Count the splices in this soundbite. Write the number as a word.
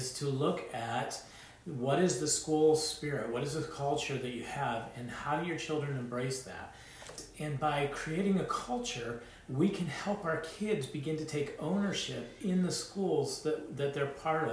one